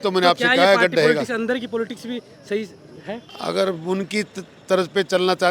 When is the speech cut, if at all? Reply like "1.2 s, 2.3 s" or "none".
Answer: 3.3 s